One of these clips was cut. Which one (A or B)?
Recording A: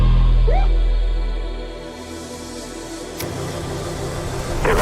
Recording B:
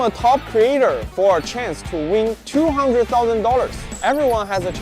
B